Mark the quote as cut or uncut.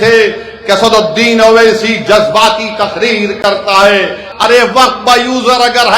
cut